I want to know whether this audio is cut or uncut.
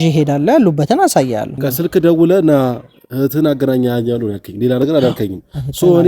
cut